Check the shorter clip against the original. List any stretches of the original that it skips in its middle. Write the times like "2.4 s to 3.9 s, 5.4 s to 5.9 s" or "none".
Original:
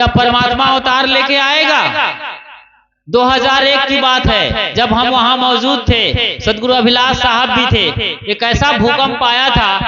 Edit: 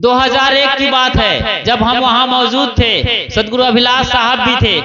none